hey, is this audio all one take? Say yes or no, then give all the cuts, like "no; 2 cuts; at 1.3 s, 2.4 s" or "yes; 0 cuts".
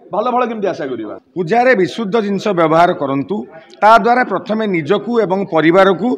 no; 1 cut; at 1.2 s